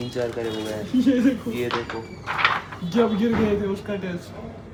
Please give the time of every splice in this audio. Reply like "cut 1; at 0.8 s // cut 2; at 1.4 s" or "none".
none

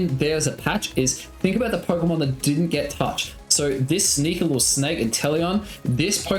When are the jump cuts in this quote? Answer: none

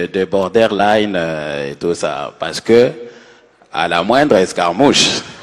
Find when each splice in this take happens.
none

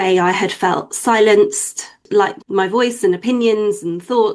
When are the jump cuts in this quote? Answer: cut 1; at 2.0 s

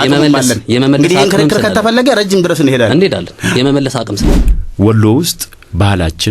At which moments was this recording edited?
cut 1; at 4.2 s

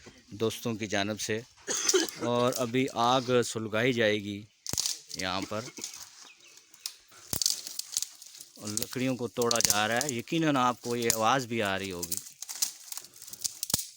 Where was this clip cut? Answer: none

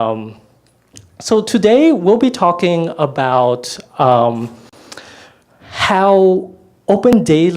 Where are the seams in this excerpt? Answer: cut 1; at 3.9 s

